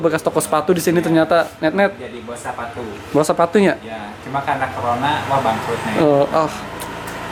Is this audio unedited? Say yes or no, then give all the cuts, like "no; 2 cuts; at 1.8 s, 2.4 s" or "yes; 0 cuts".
yes; 0 cuts